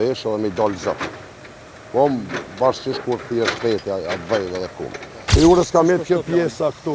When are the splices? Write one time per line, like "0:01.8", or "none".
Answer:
0:05.2